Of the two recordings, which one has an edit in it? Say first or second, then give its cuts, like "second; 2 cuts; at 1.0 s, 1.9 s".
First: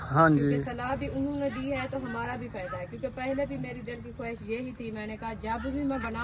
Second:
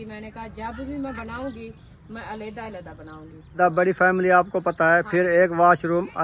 second; 1 cut; at 3.6 s